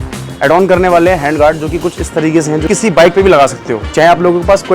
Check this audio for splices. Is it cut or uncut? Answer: cut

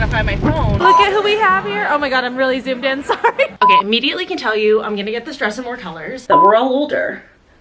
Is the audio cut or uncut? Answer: cut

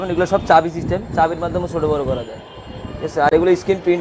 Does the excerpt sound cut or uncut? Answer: uncut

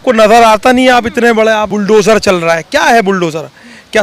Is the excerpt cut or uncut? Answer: cut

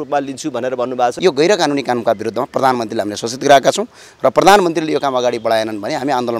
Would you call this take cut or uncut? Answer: cut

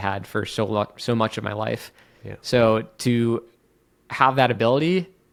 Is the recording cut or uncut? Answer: uncut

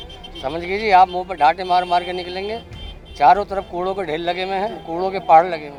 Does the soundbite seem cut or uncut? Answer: uncut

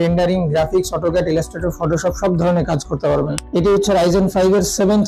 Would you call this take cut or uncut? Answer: cut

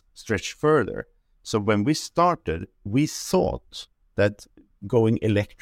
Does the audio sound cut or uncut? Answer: cut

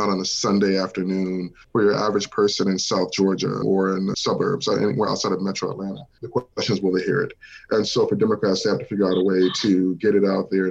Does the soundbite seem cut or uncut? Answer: cut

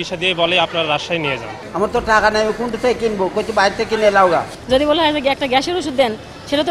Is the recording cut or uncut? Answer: cut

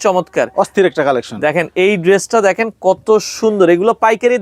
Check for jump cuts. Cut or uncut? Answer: uncut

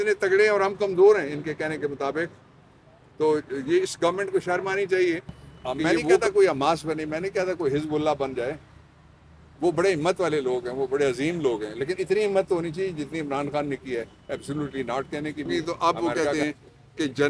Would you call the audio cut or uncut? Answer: cut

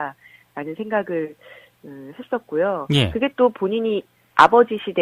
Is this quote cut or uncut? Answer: cut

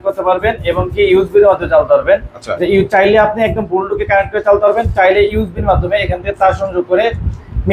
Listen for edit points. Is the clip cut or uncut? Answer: uncut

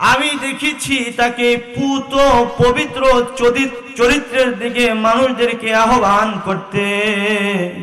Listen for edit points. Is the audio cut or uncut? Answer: uncut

